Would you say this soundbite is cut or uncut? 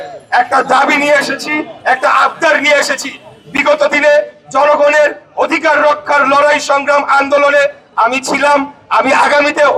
uncut